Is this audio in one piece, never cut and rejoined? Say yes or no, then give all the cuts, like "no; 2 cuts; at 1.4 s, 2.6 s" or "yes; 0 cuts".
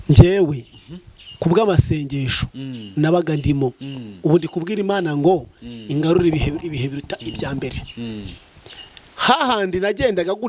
yes; 0 cuts